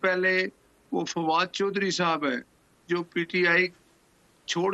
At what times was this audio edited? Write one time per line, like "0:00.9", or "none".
none